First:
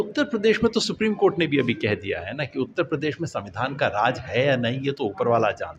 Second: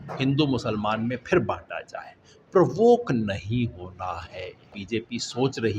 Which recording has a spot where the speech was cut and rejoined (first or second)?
second